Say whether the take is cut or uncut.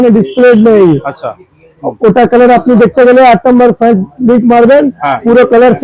uncut